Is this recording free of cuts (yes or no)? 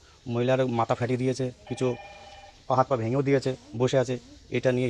yes